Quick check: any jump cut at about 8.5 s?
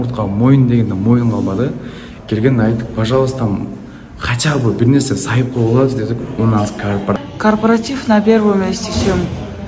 no; 1 cut; at 7.3 s

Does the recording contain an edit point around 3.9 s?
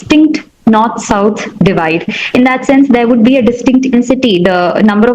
yes; 1 cut; at 3.9 s

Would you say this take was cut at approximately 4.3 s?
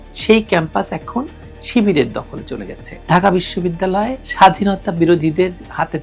no; 1 cut; at 3.0 s

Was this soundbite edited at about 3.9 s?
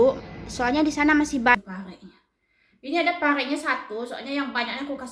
no; 1 cut; at 1.6 s

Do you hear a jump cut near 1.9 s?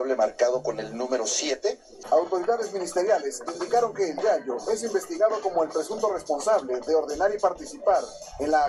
yes; 1 cut; at 1.9 s

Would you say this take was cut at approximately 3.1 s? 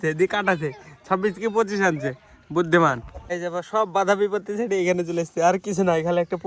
yes; 1 cut; at 3.1 s

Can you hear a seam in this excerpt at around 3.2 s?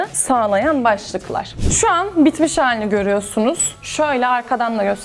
no; 1 cut; at 1.6 s

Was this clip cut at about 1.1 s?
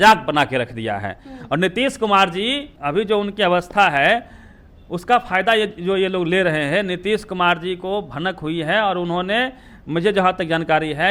no; 0 cuts

